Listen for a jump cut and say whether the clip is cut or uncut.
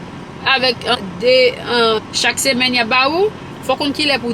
cut